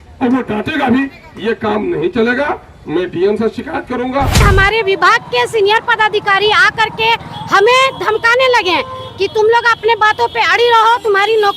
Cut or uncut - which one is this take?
cut